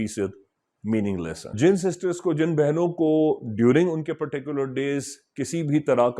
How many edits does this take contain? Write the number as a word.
one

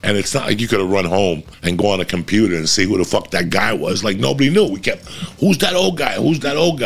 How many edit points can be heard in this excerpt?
one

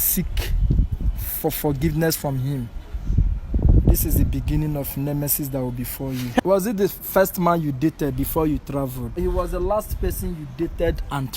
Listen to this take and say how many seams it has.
two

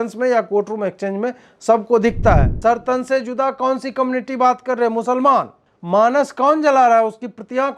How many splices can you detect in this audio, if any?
one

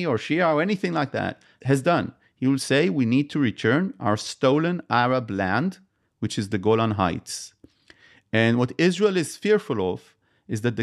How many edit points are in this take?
one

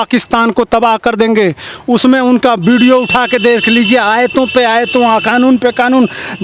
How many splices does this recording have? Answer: zero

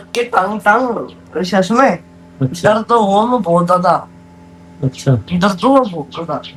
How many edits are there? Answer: zero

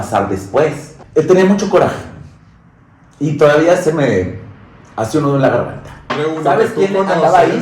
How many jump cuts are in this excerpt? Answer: two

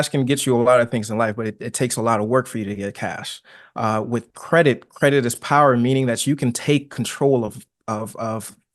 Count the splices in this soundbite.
zero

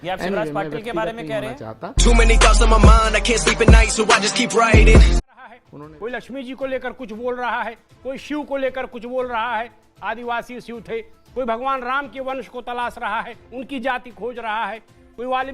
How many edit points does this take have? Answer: one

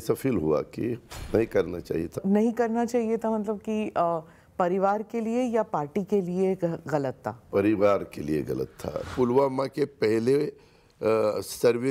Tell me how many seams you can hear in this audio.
three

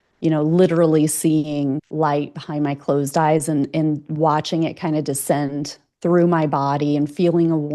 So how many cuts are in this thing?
one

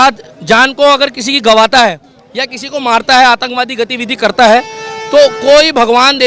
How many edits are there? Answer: zero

